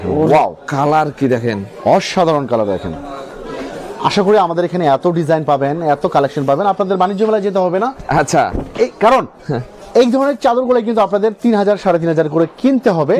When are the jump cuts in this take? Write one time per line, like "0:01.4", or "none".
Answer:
none